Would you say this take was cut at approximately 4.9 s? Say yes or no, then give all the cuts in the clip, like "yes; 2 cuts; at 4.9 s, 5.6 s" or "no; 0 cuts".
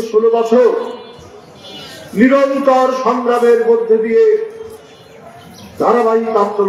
no; 0 cuts